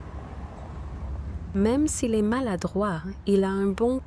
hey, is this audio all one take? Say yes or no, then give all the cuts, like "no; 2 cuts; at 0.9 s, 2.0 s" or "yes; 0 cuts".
no; 1 cut; at 1.0 s